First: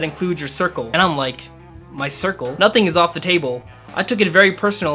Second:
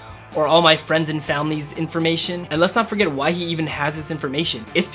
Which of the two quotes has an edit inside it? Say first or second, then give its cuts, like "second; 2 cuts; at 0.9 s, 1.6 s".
second; 1 cut; at 2.4 s